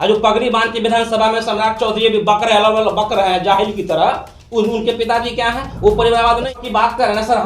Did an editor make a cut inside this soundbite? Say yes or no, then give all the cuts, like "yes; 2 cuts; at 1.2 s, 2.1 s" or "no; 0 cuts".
yes; 1 cut; at 6.5 s